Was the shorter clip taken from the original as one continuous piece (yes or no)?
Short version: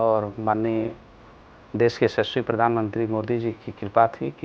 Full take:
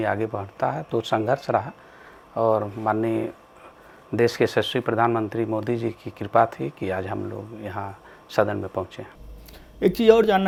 yes